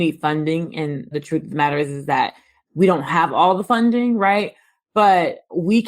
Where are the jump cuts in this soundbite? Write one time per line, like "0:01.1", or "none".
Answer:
0:01.1